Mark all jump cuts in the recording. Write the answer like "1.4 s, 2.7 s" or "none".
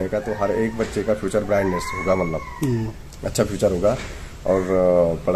none